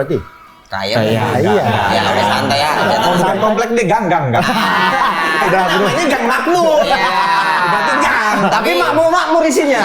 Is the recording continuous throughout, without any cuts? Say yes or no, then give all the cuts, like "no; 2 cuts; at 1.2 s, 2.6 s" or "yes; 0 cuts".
no; 1 cut; at 3.1 s